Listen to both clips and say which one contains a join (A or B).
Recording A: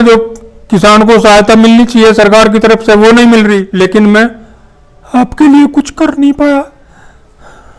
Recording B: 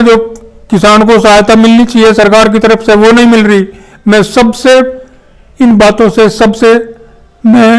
A